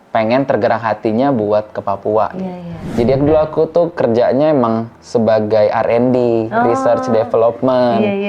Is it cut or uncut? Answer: cut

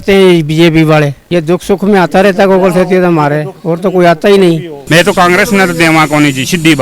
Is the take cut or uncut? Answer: cut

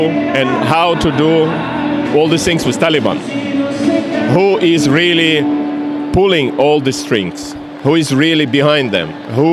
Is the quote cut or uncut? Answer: uncut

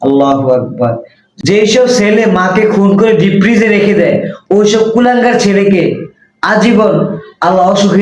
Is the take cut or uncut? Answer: cut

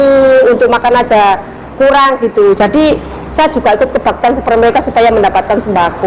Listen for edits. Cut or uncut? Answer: uncut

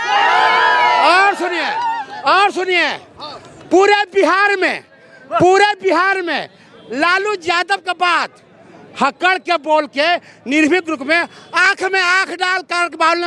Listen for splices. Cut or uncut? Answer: uncut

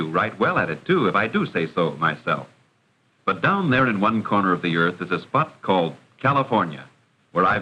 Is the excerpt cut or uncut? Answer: uncut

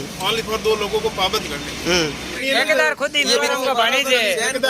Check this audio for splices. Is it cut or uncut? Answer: cut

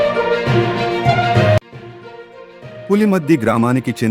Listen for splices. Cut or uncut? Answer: cut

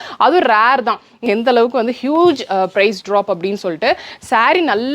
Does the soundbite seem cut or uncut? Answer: cut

